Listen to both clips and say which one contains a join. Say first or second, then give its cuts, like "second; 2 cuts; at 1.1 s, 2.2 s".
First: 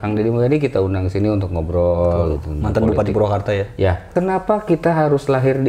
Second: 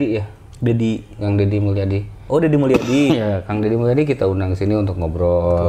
first; 1 cut; at 4.0 s